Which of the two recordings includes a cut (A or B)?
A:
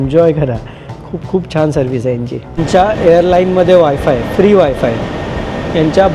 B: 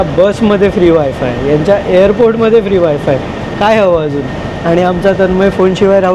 A